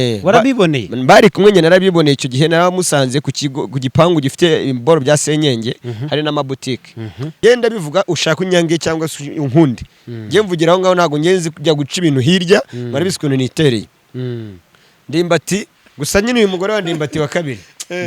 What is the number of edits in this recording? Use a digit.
2